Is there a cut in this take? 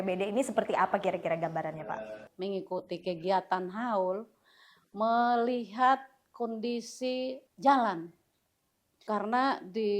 yes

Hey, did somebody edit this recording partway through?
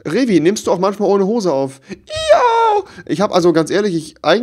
no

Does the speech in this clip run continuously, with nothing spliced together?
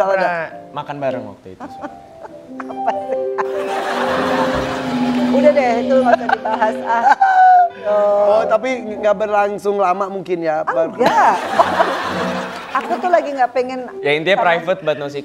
yes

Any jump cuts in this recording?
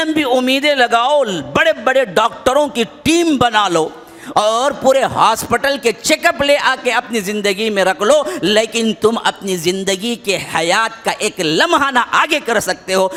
no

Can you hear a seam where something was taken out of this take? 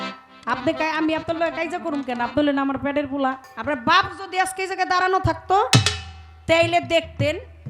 yes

